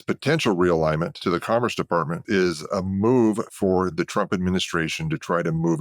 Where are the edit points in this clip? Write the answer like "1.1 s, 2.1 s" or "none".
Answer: 1.1 s, 2.2 s